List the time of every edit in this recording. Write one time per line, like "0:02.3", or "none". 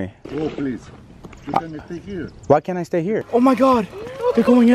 0:03.2